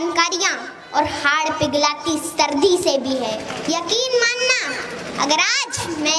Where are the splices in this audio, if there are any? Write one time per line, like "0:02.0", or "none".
0:03.5